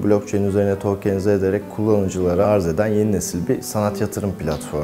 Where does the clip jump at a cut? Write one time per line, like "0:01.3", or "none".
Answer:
none